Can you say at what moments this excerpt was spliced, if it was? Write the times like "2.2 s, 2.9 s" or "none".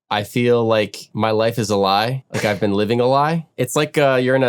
1.0 s, 2.2 s, 3.5 s